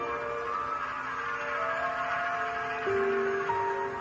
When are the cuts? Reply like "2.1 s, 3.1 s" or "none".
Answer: 1.7 s